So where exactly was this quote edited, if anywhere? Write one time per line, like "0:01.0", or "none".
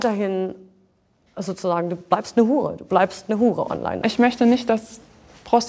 0:04.0